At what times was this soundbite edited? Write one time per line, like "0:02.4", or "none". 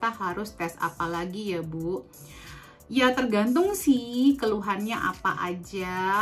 none